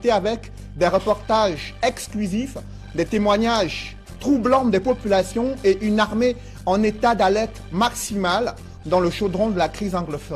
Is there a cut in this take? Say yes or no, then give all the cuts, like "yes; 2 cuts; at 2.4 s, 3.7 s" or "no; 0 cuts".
yes; 1 cut; at 0.9 s